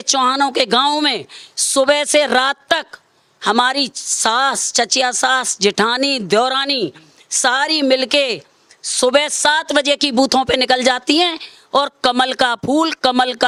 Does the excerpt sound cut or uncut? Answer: uncut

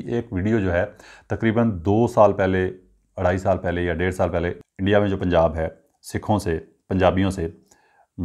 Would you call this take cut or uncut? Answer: cut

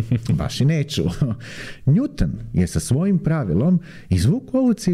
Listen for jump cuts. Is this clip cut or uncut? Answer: cut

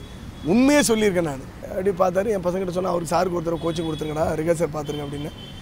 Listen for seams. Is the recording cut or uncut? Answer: cut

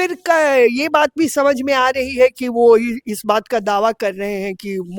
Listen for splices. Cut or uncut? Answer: uncut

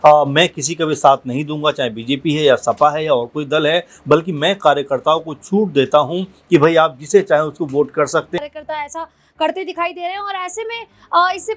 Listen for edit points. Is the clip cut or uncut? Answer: cut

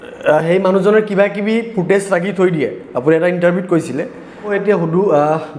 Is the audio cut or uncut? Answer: cut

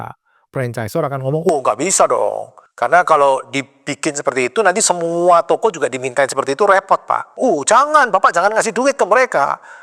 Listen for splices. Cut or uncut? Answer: cut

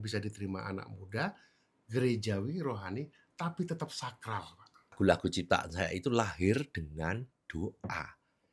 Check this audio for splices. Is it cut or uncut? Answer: cut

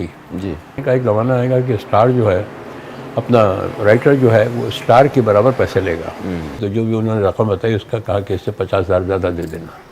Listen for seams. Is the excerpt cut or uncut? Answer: cut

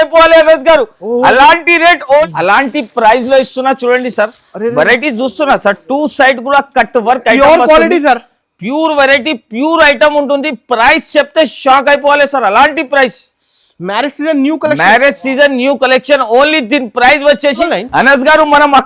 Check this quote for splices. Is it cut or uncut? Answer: cut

